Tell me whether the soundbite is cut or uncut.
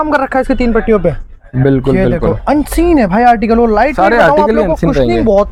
uncut